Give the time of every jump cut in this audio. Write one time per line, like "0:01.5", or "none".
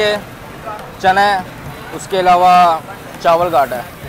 none

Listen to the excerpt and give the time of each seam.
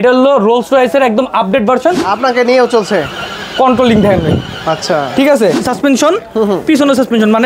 0:02.1
0:05.6

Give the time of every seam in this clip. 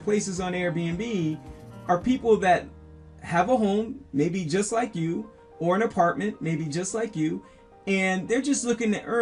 none

